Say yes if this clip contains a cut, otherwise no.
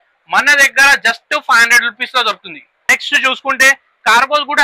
yes